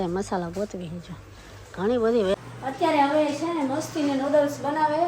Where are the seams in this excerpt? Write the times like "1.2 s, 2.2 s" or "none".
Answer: 2.3 s